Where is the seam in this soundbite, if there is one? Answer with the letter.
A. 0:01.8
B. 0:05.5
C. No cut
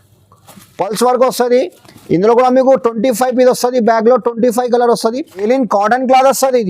B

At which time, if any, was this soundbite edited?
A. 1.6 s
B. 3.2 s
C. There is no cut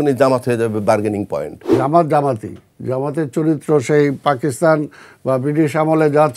A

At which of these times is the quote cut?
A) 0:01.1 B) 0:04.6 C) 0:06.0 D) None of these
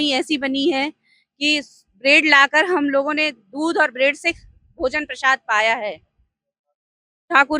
D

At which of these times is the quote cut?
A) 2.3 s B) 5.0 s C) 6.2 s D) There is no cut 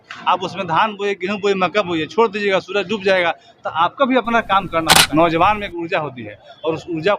B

